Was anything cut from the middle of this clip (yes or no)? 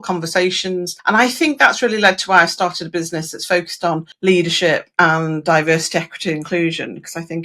yes